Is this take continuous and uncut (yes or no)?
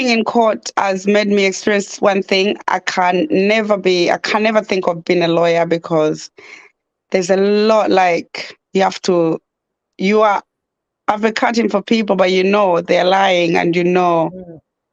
yes